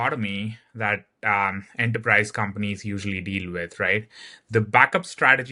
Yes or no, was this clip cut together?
no